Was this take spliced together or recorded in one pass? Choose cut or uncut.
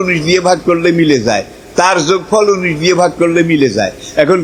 uncut